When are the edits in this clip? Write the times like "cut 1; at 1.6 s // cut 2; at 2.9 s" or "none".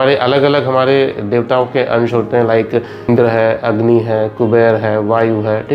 cut 1; at 3.1 s